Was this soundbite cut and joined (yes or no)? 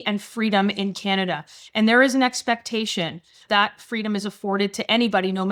no